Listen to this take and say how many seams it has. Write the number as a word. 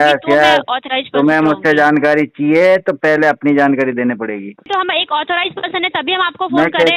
one